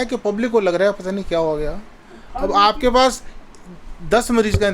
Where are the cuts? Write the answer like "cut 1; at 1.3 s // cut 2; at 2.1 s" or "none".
none

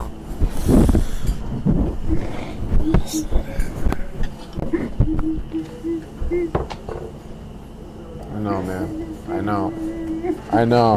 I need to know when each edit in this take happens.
none

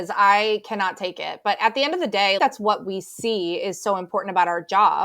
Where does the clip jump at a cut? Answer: cut 1; at 2.4 s

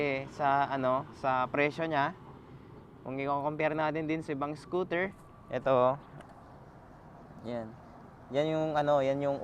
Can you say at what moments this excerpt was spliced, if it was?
cut 1; at 5.2 s

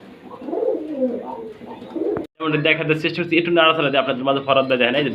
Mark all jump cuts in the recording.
cut 1; at 2.5 s

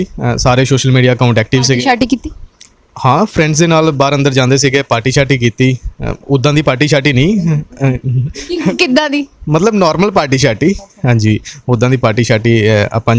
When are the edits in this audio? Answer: none

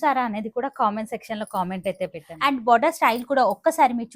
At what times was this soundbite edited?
cut 1; at 2.3 s

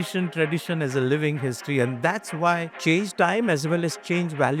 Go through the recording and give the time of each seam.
cut 1; at 2.7 s

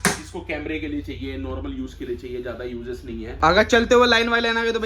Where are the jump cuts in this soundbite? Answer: cut 1; at 3.3 s

